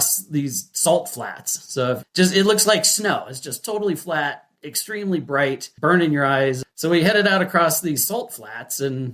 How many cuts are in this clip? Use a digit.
3